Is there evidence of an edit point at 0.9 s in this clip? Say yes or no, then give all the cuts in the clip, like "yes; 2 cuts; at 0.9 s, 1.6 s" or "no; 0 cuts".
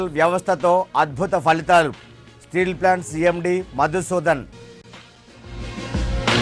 no; 0 cuts